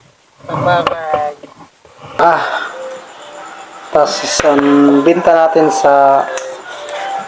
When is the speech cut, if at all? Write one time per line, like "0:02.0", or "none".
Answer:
0:02.2

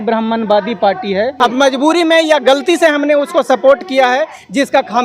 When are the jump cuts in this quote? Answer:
0:01.3

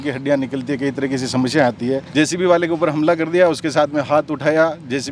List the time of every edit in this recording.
0:02.0

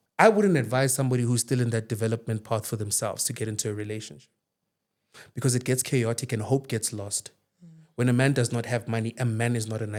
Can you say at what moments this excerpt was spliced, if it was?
none

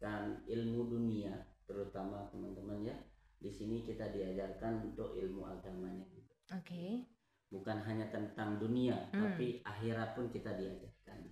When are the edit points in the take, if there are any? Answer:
none

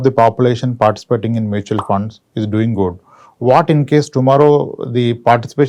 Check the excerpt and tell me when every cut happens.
none

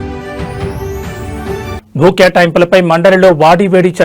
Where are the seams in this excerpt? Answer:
0:01.8

